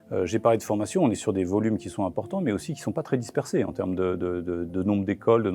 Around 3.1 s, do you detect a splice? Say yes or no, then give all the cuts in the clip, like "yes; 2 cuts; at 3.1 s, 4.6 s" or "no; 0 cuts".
no; 0 cuts